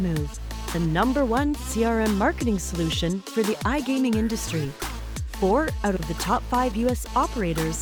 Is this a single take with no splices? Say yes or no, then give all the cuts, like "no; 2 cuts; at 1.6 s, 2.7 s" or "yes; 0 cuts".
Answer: yes; 0 cuts